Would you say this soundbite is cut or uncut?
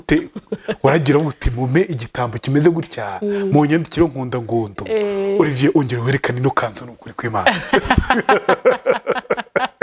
uncut